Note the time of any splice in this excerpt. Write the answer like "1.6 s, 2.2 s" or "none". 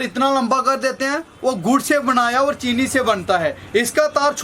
none